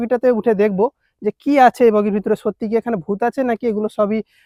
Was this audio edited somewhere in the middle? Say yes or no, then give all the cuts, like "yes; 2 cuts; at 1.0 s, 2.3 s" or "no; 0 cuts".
no; 0 cuts